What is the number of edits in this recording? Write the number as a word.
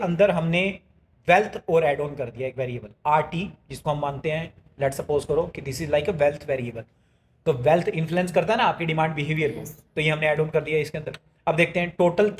zero